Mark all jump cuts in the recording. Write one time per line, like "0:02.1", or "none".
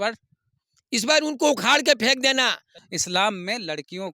0:02.7